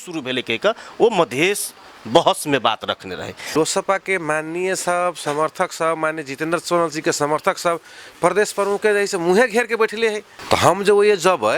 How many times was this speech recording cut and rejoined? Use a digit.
2